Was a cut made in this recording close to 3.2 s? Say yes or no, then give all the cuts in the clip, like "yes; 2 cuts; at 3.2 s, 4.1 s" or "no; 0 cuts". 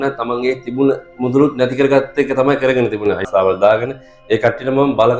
yes; 1 cut; at 3.2 s